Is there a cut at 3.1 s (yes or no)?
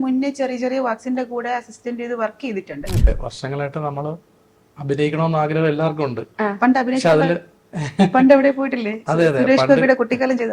yes